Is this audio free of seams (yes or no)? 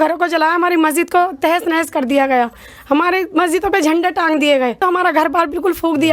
no